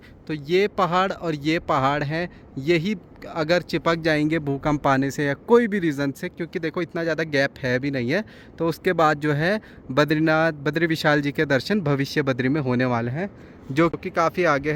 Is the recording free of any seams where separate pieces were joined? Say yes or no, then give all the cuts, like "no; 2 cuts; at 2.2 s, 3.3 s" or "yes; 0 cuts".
yes; 0 cuts